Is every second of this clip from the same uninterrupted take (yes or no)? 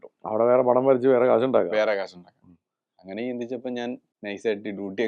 no